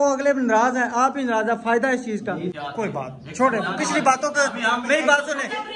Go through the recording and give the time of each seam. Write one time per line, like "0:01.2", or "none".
0:02.5